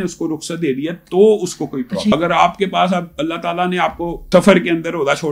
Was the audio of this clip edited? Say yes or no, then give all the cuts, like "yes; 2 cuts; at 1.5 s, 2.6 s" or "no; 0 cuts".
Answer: yes; 2 cuts; at 2.1 s, 4.2 s